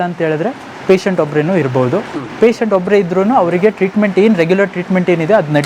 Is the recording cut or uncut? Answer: uncut